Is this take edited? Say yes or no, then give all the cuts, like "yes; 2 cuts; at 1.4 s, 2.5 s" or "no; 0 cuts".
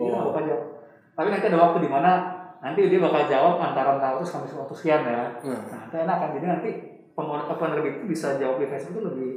no; 0 cuts